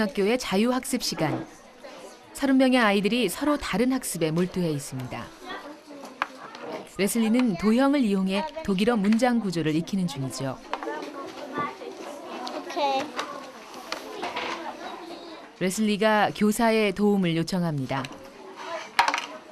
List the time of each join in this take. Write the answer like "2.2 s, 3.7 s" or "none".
16.2 s